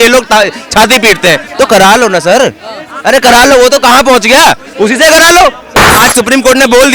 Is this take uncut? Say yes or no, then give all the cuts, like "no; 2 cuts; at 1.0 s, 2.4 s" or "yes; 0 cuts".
no; 1 cut; at 6.0 s